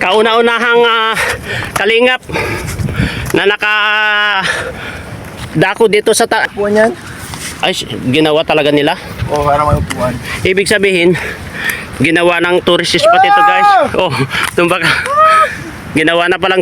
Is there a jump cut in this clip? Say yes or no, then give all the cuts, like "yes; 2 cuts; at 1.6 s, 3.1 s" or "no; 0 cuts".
yes; 1 cut; at 6.4 s